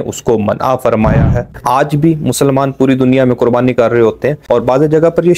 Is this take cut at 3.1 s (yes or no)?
no